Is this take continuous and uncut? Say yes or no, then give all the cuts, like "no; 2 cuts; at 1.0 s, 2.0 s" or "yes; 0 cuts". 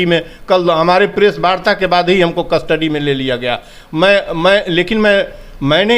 yes; 0 cuts